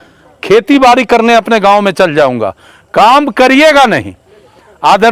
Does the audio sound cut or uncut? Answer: uncut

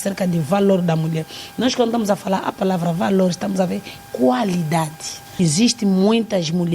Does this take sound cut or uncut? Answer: cut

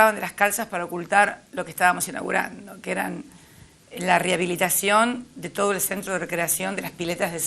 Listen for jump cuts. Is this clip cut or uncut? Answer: uncut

